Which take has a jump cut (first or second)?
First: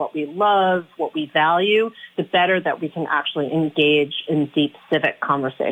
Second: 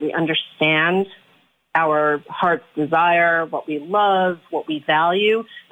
second